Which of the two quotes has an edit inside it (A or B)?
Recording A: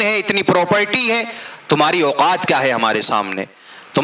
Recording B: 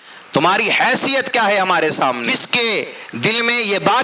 B